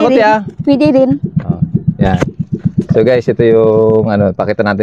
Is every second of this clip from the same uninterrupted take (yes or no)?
yes